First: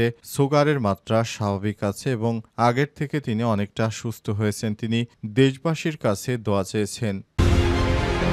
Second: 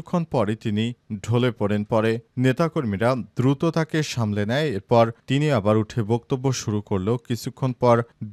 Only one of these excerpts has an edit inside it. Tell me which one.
first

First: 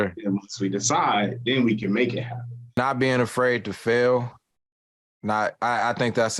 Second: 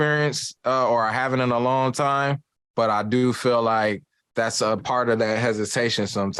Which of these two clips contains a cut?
first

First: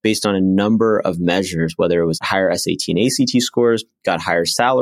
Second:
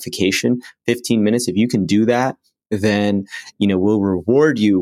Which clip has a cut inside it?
first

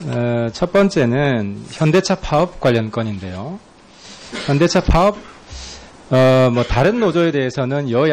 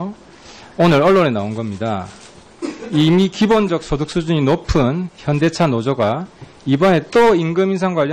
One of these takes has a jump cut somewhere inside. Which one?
second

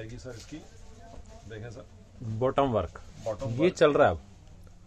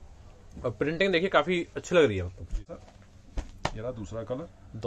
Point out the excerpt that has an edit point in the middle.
second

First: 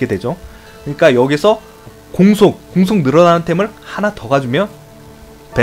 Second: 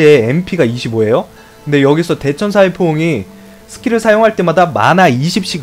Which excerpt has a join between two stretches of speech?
first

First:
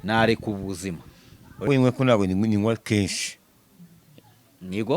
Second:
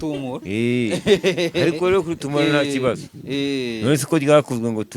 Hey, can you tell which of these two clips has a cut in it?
first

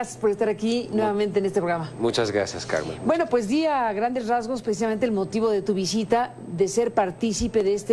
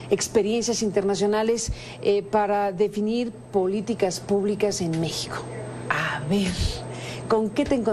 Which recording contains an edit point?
second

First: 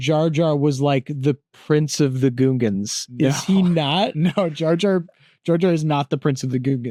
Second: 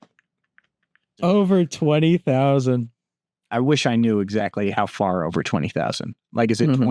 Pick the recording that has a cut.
second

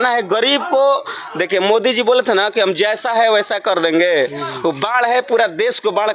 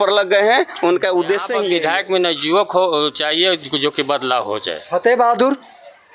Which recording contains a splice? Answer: second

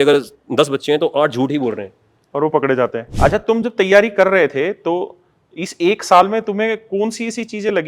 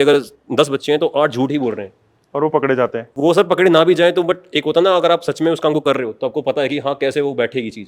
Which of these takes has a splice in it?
first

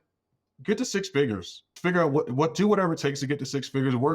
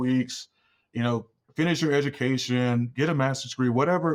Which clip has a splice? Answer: first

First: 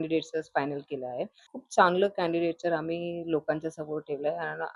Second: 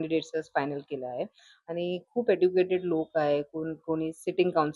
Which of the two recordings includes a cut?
first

